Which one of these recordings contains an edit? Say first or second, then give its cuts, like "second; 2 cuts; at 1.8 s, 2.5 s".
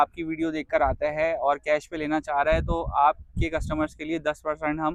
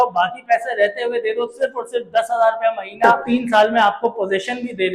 second; 1 cut; at 3.2 s